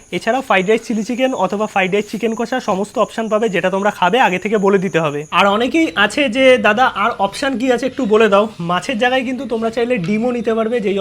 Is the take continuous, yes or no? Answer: no